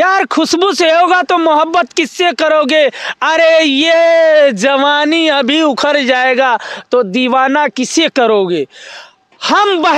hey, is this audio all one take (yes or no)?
yes